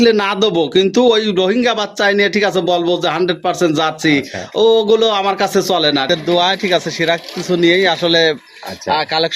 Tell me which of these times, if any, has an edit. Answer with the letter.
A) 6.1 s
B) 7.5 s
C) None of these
A